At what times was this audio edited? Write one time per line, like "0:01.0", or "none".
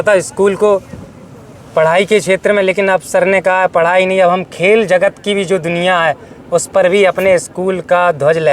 none